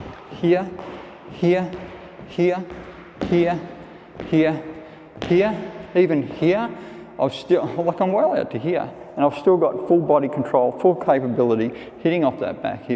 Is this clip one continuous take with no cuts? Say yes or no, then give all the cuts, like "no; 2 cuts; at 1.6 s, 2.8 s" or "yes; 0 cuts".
yes; 0 cuts